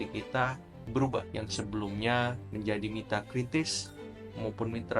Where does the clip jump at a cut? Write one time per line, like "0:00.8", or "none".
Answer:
0:01.3
0:02.4